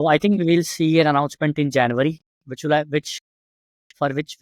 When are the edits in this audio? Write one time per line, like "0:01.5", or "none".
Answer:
none